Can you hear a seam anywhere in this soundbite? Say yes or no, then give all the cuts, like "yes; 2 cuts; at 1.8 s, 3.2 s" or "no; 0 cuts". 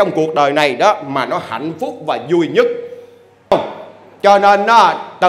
yes; 1 cut; at 3.5 s